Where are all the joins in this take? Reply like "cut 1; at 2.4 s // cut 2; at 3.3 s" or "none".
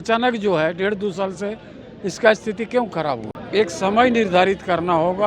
cut 1; at 3.2 s